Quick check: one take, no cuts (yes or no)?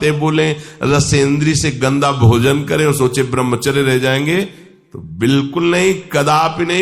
yes